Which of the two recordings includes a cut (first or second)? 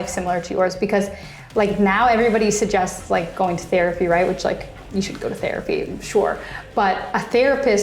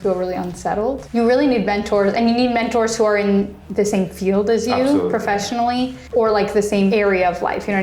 second